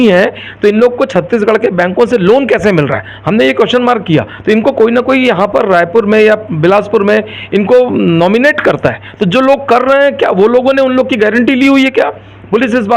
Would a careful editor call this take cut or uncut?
uncut